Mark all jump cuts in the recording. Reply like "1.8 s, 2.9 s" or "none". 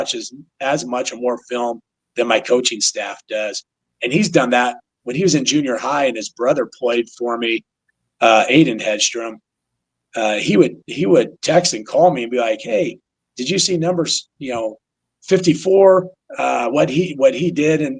none